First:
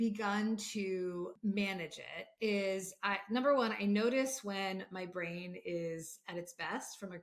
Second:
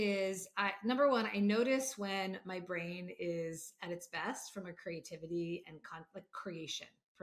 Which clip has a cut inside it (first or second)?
first